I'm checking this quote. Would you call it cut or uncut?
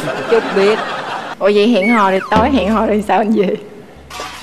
cut